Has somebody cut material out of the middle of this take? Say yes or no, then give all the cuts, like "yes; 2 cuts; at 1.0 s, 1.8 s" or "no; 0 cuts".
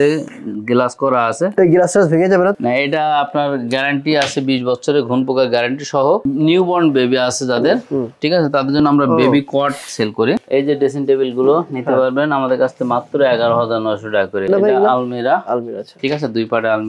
yes; 4 cuts; at 2.5 s, 6.3 s, 10.4 s, 14.5 s